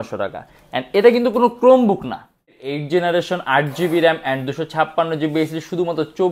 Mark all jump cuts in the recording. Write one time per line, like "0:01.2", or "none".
0:02.7

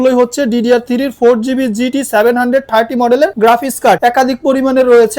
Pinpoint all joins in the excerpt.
0:04.0

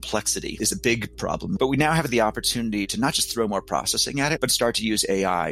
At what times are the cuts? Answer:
0:01.2

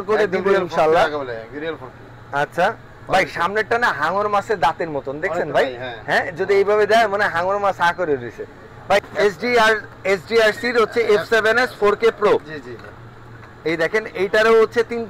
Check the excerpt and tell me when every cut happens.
0:09.1

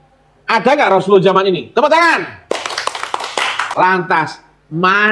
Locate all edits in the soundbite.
0:03.7

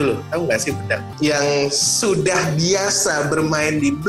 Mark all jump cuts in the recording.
0:01.1

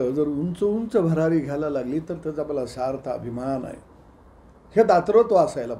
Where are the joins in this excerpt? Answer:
none

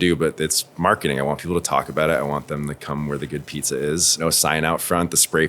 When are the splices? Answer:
0:04.2

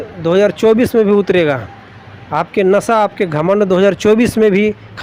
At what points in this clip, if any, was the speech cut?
none

